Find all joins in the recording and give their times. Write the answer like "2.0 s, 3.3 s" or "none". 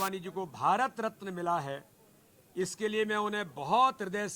none